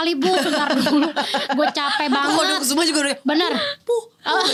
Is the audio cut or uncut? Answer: uncut